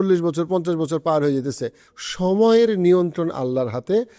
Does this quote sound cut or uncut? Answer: cut